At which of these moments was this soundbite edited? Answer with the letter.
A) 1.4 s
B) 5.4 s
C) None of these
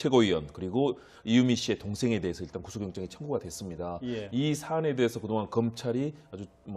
A